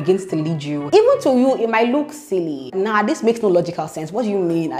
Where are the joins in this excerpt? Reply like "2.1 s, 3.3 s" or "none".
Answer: none